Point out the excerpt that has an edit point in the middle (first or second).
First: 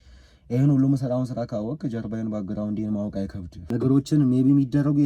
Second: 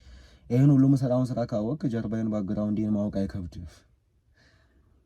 first